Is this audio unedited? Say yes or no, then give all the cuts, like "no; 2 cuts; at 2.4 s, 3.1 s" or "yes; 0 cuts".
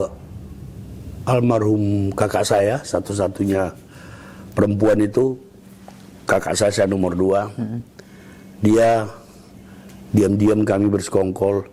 yes; 0 cuts